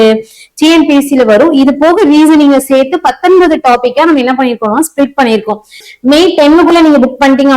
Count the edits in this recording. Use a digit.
1